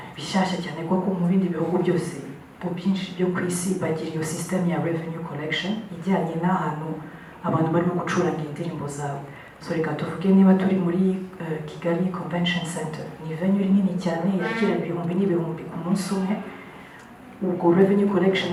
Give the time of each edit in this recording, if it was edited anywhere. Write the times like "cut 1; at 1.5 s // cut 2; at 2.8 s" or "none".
none